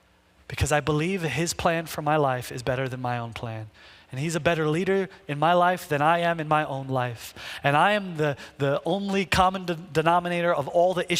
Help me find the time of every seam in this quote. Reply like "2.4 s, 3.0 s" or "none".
none